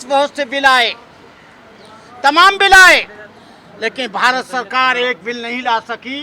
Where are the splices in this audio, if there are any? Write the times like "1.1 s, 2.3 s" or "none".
none